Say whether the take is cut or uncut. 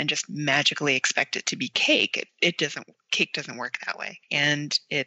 uncut